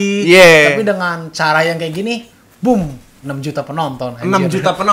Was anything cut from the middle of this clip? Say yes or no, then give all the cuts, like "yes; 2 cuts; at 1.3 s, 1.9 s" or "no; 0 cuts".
no; 0 cuts